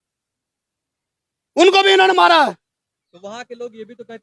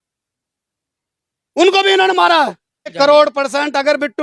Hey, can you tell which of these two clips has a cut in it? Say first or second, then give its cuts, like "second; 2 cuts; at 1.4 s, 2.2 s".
second; 1 cut; at 2.9 s